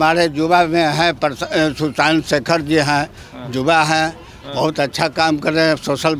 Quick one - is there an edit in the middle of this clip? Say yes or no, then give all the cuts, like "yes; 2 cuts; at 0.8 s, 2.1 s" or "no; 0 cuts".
no; 0 cuts